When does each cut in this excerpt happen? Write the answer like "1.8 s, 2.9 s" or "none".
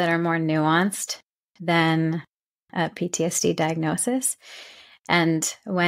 none